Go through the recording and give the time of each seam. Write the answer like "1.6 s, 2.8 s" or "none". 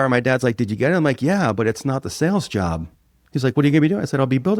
none